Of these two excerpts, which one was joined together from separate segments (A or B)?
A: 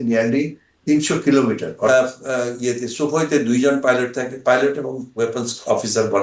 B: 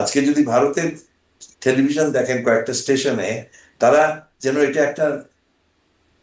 A